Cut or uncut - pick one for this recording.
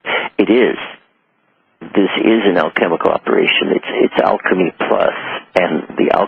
cut